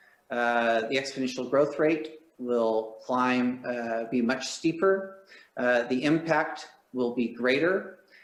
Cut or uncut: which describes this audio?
uncut